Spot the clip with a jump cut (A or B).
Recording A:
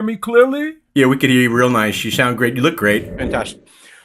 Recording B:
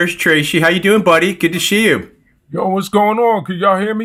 A